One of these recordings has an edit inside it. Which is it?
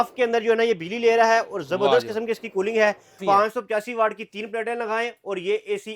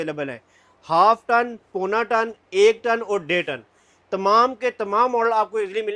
first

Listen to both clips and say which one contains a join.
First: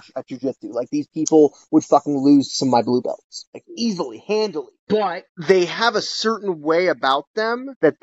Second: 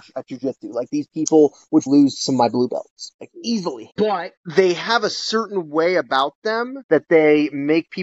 second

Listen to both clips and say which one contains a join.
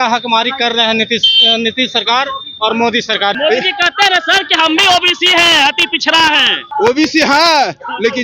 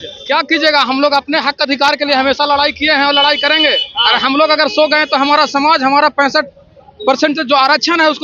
first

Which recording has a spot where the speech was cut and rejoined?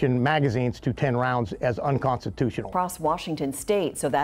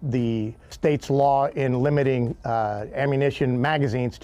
first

